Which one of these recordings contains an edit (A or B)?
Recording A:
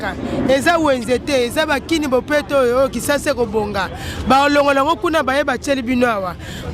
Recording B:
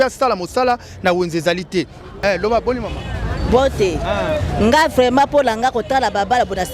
B